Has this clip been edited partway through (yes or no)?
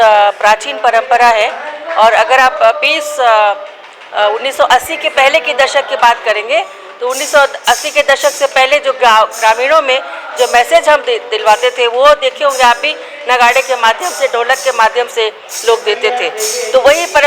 no